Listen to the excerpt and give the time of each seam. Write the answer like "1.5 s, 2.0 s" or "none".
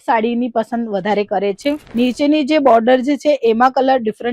1.8 s